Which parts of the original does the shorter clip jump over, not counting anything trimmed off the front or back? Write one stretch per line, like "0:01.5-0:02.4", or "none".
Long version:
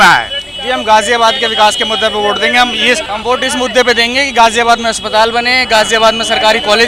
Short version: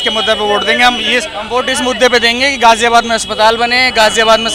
none